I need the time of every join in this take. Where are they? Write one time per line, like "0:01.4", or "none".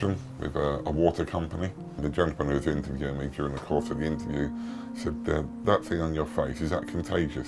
0:01.9

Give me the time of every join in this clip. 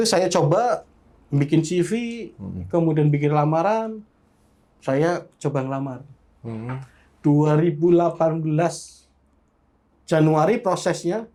none

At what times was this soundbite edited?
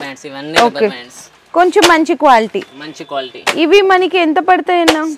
none

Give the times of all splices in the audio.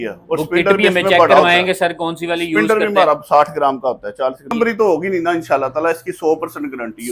0:04.5

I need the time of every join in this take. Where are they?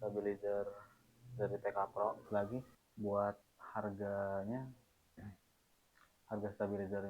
0:02.2

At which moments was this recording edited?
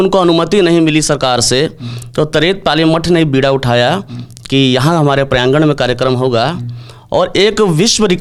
none

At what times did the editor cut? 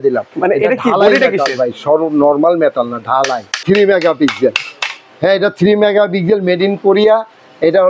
0:03.6

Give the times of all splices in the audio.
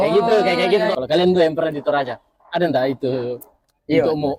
0:00.9

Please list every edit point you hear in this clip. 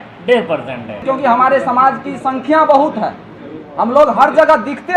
0:01.0

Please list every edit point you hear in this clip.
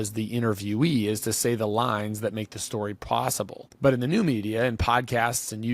0:03.6

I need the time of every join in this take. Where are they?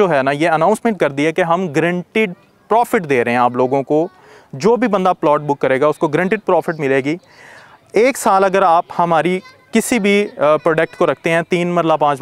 none

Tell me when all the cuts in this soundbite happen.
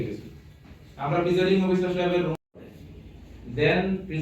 0:02.4

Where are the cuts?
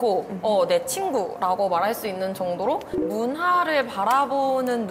0:02.9

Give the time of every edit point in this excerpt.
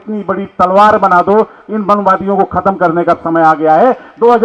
none

